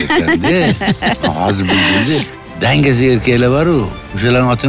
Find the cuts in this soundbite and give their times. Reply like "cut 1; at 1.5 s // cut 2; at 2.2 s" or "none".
cut 1; at 2.3 s